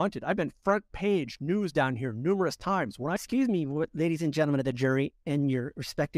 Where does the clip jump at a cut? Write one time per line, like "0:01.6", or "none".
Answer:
0:03.1

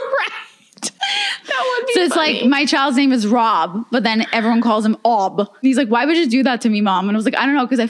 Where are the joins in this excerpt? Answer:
0:05.6

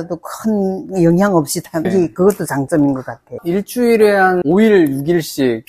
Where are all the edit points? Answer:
0:01.9
0:04.4

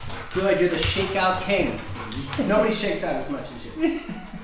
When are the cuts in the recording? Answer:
none

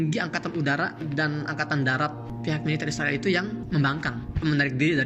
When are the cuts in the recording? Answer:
0:01.0
0:02.3
0:03.6

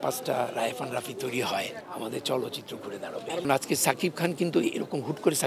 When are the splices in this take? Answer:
0:01.8
0:03.4

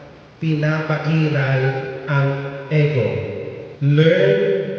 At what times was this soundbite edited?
0:03.6

